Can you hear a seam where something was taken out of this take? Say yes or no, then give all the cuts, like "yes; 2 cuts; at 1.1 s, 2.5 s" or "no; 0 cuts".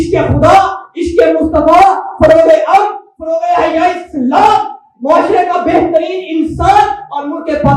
no; 0 cuts